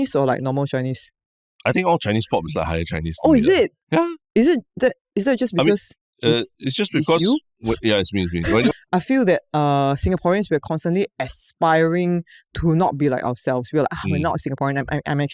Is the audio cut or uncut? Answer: cut